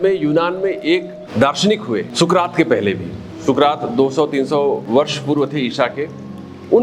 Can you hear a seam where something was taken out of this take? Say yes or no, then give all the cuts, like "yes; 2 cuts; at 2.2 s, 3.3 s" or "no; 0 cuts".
yes; 3 cuts; at 1.2 s, 2.1 s, 4.8 s